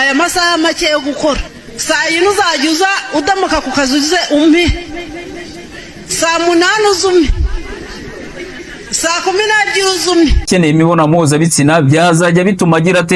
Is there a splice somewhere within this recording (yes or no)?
yes